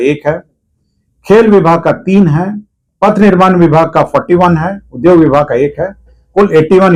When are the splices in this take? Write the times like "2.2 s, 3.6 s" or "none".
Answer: none